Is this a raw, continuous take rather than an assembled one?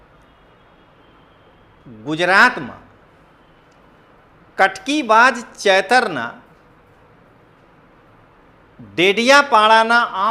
yes; 0 cuts

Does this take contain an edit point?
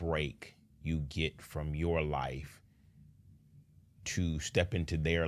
no; 0 cuts

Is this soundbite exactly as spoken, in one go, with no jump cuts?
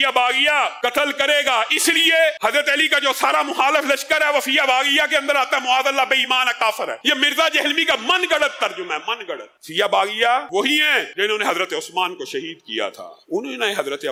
yes; 0 cuts

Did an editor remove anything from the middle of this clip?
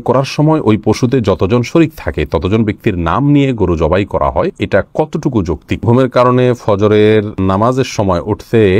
yes; 3 cuts; at 4.6 s, 5.9 s, 7.3 s

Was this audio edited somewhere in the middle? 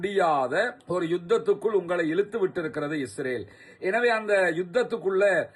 no; 0 cuts

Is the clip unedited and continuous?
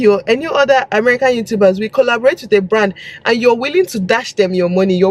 yes; 0 cuts

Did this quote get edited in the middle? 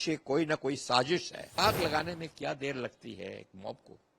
yes; 1 cut; at 1.6 s

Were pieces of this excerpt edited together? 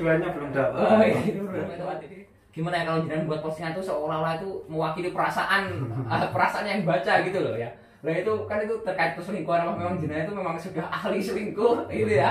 yes; 1 cut; at 1.9 s

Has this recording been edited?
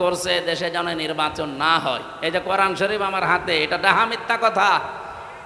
no; 0 cuts

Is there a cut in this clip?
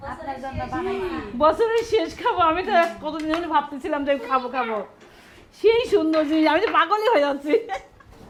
no; 0 cuts

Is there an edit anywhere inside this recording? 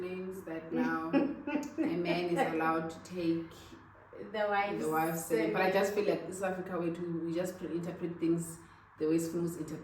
no; 0 cuts

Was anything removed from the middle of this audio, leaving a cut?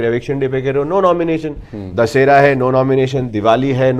no; 0 cuts

